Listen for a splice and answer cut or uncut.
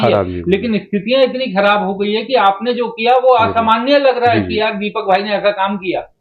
uncut